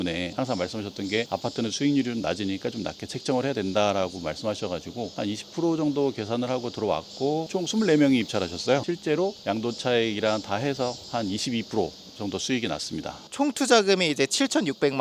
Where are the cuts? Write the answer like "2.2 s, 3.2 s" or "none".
none